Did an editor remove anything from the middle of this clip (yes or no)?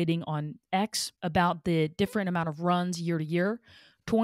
no